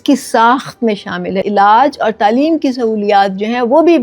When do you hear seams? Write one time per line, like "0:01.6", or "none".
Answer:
0:01.4

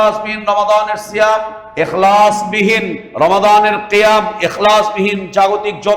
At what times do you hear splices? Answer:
0:01.6
0:03.0

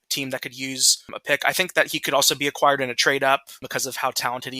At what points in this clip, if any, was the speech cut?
0:03.7

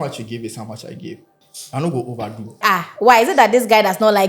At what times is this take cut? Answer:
0:01.4
0:02.6

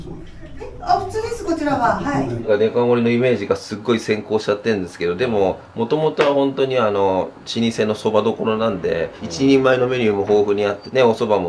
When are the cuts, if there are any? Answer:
none

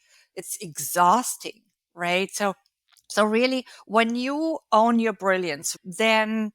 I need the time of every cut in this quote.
0:05.7

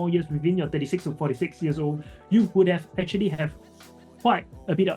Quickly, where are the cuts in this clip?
none

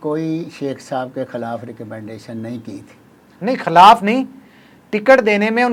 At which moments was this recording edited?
none

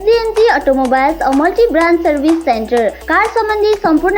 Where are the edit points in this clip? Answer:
none

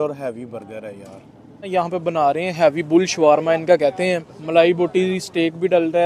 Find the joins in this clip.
0:01.7
0:04.3

